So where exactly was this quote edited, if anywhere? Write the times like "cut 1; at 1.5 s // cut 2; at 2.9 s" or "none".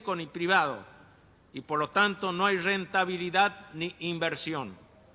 cut 1; at 3.7 s